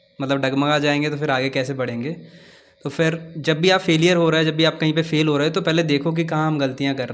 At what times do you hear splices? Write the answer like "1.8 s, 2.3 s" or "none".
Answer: none